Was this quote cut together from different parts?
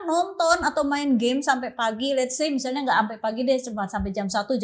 no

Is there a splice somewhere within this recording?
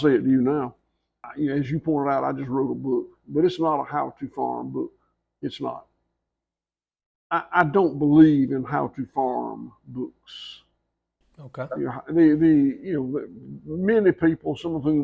yes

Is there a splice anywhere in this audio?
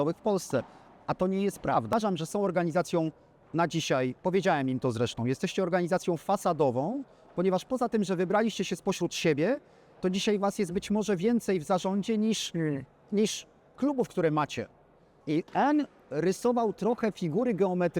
yes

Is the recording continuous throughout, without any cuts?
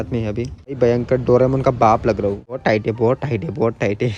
no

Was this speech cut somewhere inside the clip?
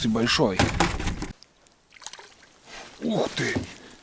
yes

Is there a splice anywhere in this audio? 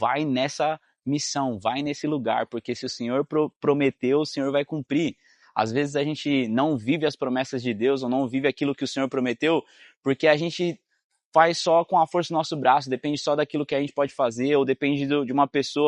no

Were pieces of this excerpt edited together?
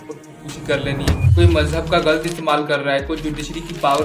yes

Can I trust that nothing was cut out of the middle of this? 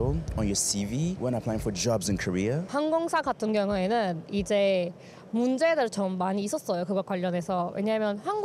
no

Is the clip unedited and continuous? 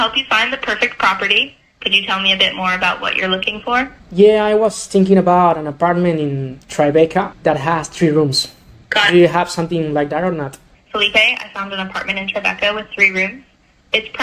no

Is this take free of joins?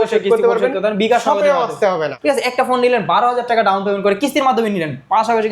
no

